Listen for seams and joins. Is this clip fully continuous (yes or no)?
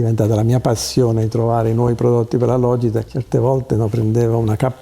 yes